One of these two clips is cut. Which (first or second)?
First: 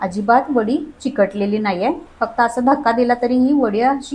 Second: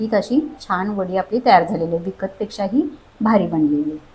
first